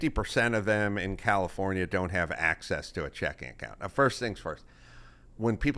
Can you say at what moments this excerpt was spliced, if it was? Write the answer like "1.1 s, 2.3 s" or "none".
none